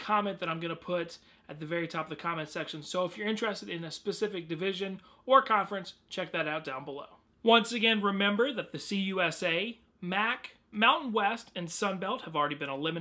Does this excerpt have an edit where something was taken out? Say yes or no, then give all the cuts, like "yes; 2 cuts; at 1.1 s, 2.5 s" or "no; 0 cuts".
yes; 1 cut; at 1.8 s